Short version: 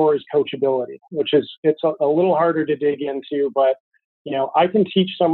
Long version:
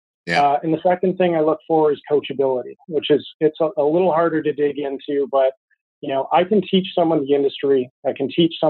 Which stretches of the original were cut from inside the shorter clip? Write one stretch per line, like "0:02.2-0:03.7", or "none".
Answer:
none